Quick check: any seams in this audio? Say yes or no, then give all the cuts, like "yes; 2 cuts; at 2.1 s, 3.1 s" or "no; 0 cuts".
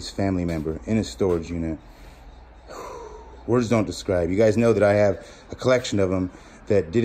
no; 0 cuts